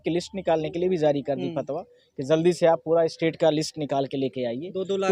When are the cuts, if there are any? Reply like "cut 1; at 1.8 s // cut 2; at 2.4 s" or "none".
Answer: none